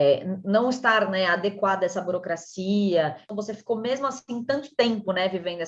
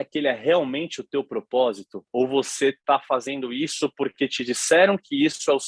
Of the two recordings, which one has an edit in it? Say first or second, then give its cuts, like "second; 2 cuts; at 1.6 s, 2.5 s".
first; 1 cut; at 3.3 s